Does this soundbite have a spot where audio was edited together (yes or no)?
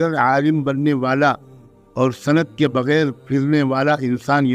no